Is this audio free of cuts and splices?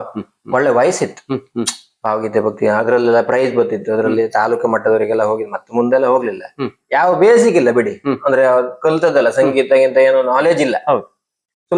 yes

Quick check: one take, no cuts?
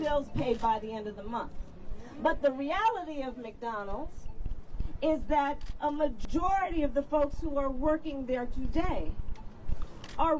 no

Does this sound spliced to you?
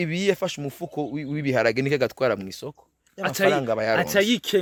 no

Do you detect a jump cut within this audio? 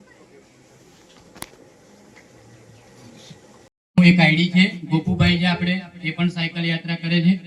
yes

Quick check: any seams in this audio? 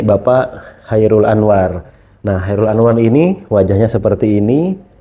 no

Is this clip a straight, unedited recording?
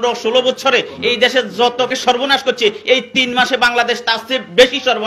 no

